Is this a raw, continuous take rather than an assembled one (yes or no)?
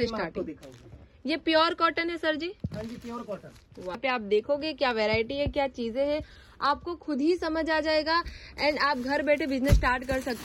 no